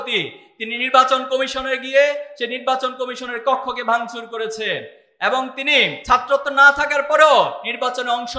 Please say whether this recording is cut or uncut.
cut